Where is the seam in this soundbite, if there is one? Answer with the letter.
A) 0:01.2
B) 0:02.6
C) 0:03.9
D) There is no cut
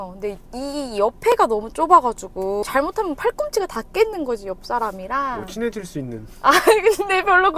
B